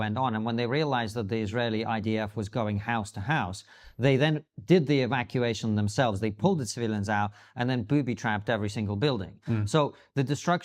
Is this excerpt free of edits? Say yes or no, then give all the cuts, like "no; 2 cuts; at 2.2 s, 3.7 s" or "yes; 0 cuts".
yes; 0 cuts